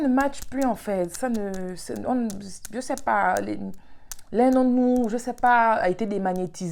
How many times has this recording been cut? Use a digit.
0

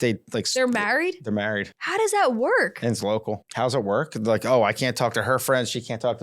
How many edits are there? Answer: 2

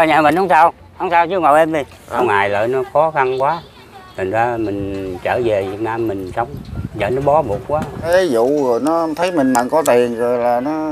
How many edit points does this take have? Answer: 2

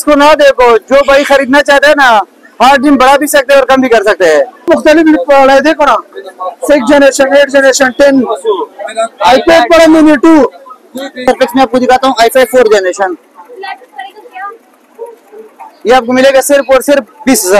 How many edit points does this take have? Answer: 2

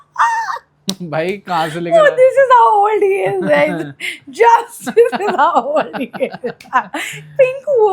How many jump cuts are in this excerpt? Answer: 0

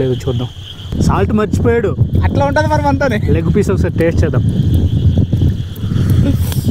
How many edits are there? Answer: 1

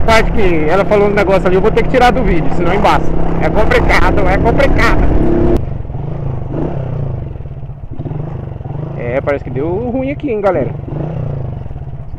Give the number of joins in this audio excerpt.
1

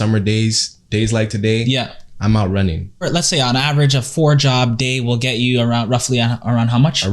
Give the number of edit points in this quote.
1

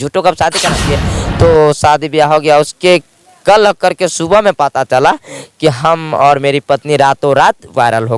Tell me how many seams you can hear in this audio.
1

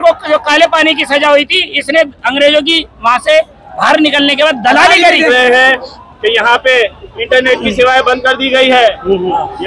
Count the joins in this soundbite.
1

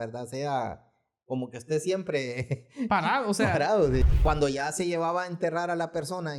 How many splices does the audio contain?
1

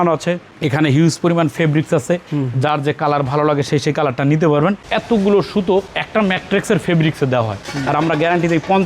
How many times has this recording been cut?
2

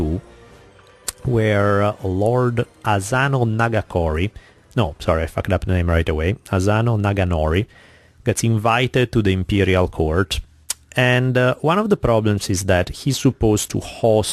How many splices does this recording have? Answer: 0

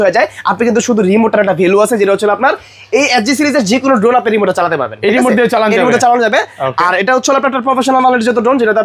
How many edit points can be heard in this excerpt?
0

